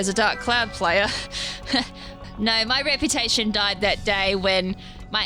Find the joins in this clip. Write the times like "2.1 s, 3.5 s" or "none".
2.2 s